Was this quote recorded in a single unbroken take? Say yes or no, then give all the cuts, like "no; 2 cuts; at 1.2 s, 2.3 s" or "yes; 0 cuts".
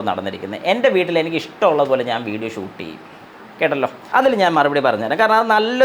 no; 1 cut; at 4.0 s